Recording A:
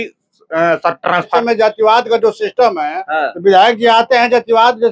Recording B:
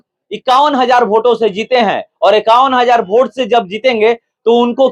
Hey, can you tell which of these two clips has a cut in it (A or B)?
A